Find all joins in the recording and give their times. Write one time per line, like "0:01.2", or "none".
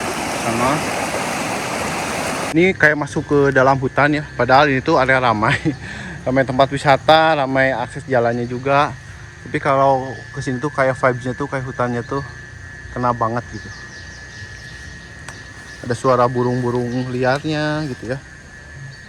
0:02.5